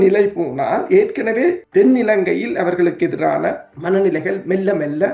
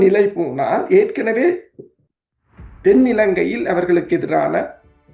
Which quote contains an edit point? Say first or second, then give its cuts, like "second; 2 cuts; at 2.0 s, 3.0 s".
first; 2 cuts; at 1.6 s, 3.7 s